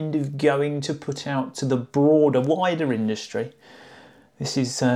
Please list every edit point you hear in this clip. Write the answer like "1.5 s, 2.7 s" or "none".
none